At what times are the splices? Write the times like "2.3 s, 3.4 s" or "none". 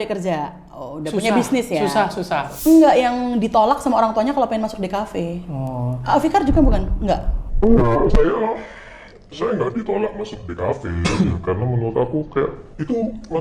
2.5 s